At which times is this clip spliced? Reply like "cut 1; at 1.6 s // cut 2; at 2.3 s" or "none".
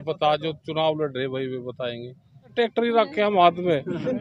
cut 1; at 2.5 s